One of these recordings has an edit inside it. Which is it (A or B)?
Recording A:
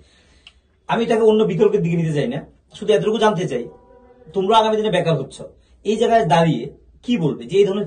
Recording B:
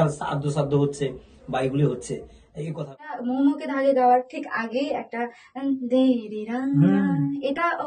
B